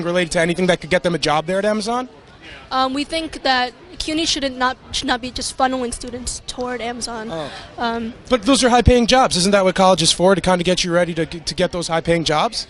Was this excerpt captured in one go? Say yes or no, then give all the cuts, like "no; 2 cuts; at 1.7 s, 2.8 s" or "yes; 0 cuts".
yes; 0 cuts